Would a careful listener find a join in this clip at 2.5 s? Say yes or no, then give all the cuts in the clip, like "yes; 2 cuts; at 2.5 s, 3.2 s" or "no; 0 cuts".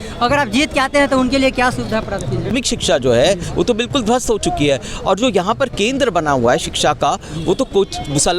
yes; 1 cut; at 2.5 s